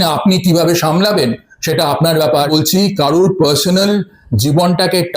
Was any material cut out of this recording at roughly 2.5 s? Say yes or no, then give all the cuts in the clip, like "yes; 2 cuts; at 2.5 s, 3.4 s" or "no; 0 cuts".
yes; 1 cut; at 2.5 s